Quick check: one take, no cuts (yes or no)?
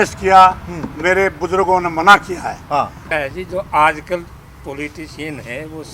no